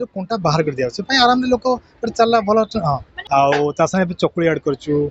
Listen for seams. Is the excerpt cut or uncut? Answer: cut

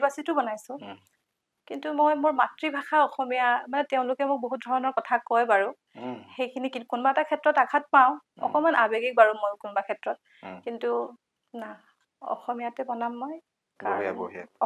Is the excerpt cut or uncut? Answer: uncut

